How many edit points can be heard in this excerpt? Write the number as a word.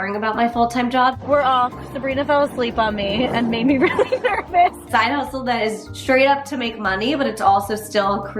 two